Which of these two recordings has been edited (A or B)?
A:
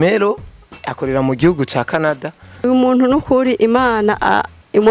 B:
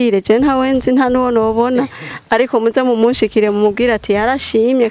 A